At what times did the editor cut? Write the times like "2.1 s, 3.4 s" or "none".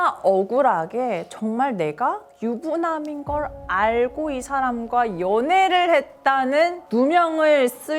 none